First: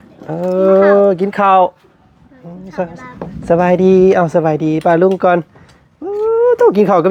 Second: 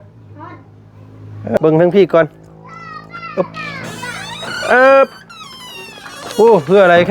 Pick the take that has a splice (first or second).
second